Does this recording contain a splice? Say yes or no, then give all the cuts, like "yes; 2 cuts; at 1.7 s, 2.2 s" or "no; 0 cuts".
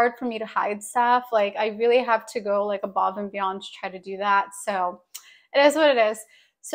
no; 0 cuts